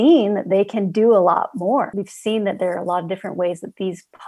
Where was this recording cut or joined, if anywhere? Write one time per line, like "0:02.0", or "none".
0:01.9